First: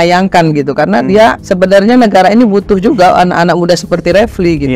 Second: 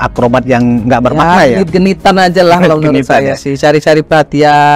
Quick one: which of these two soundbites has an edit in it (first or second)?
first